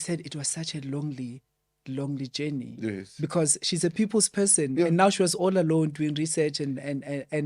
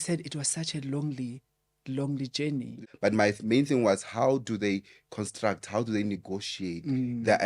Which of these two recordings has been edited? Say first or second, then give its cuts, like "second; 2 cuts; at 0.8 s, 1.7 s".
second; 1 cut; at 2.8 s